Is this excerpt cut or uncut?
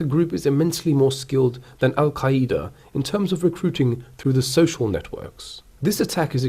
uncut